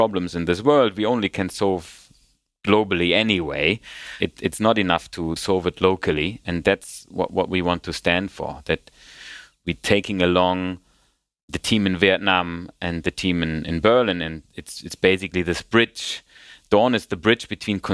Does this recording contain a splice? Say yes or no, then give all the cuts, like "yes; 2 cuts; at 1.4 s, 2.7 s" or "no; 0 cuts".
no; 0 cuts